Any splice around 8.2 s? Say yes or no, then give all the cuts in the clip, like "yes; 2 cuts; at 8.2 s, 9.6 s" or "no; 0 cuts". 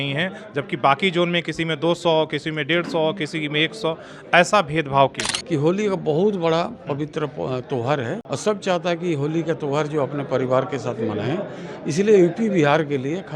yes; 2 cuts; at 5.3 s, 8.2 s